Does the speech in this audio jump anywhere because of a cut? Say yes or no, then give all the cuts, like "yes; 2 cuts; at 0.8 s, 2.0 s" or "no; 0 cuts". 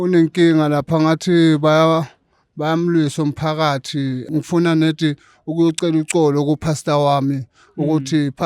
no; 0 cuts